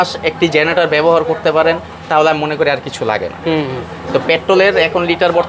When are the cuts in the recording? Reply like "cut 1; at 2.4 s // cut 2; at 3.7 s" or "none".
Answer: none